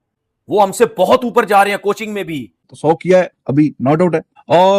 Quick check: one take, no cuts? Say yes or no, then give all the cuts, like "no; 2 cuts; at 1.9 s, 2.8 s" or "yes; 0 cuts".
no; 1 cut; at 2.6 s